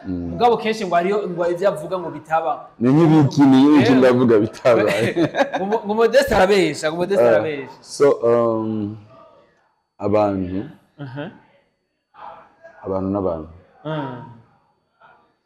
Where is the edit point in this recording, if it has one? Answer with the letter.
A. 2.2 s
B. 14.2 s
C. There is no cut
C